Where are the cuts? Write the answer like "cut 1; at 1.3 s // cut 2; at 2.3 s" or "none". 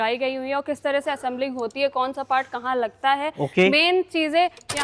none